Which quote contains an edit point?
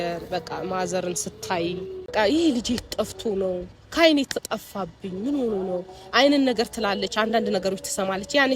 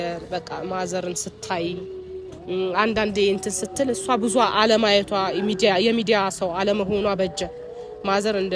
first; 1 cut; at 2.1 s

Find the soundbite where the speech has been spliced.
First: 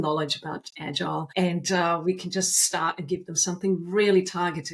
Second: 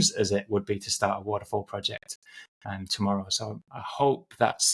first; 1 cut; at 1.3 s

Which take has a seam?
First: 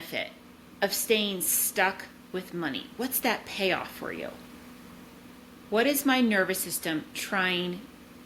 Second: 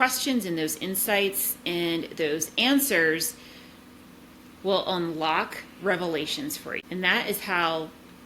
second; 1 cut; at 6.8 s

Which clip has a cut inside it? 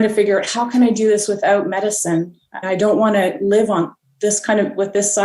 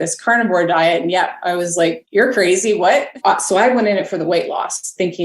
second; 2 cuts; at 2.0 s, 3.2 s

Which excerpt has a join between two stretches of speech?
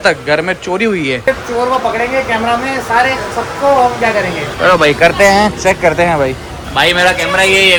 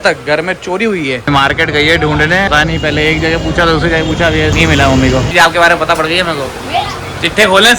second; 4 cuts; at 1.3 s, 2.5 s, 4.5 s, 5.3 s

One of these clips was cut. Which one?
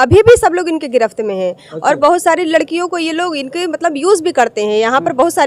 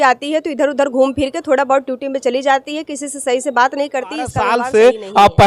second; 1 cut; at 4.5 s

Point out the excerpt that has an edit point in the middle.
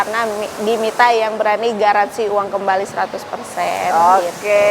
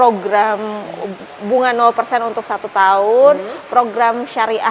second; 1 cut; at 1.2 s

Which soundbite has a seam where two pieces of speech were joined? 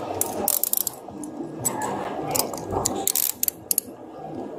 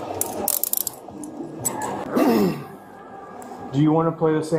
second; 1 cut; at 2.0 s

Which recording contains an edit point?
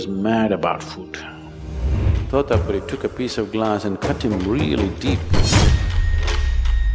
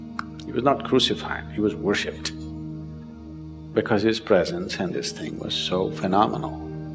first; 1 cut; at 2.0 s

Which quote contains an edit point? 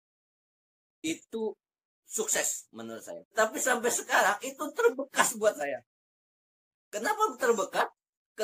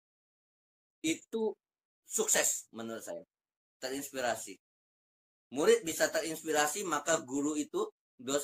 first; 1 cut; at 3.2 s

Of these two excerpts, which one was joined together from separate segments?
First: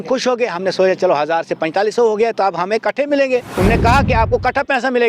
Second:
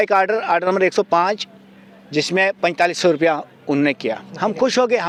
first; 1 cut; at 3.5 s

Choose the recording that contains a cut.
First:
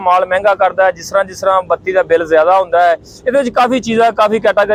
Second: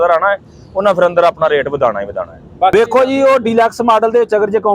second; 1 cut; at 2.7 s

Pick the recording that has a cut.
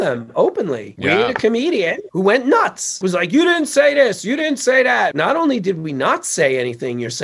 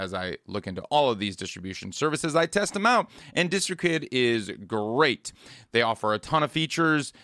first; 4 cuts; at 0.9 s, 2.0 s, 3.0 s, 5.1 s

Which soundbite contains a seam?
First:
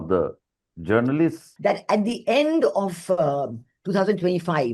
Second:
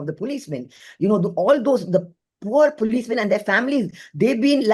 first; 1 cut; at 1.5 s

